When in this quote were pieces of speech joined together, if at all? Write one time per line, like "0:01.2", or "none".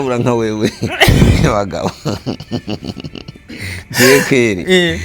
none